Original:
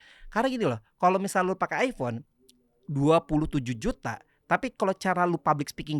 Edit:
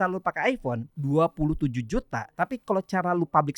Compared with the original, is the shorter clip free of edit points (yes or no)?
no